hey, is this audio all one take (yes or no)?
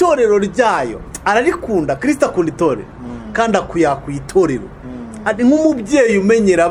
yes